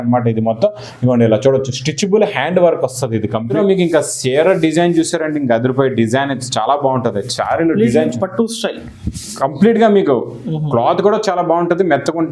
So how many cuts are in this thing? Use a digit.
1